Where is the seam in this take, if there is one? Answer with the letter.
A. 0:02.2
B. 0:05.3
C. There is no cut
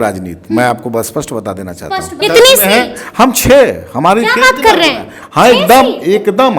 A